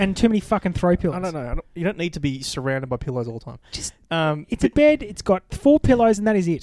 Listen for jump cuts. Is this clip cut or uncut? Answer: uncut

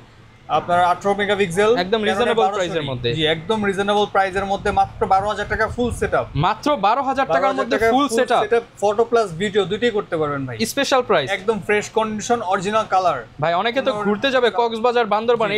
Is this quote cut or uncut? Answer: uncut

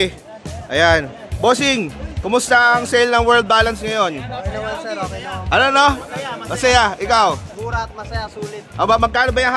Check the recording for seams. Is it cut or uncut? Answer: uncut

